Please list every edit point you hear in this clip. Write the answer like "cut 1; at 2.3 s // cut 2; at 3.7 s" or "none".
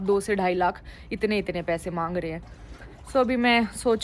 none